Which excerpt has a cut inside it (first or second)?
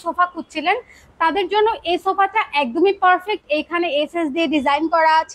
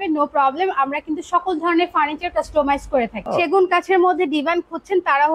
second